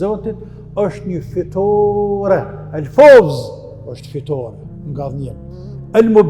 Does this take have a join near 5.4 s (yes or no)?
no